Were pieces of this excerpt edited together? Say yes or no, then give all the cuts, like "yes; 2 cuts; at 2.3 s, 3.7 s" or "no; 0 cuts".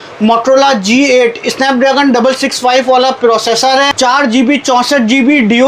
yes; 2 cuts; at 1.6 s, 3.9 s